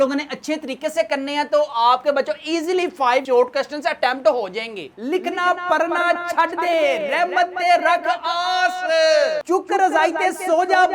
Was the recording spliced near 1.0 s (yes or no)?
no